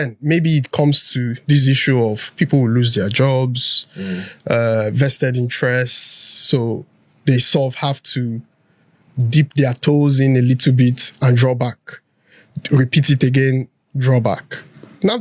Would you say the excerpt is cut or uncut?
uncut